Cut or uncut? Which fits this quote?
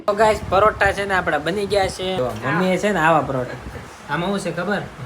cut